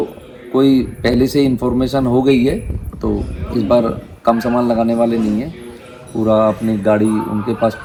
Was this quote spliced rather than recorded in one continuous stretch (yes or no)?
no